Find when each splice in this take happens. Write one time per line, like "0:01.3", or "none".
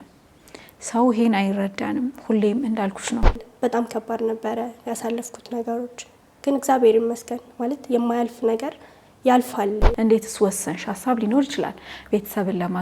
0:03.5
0:09.9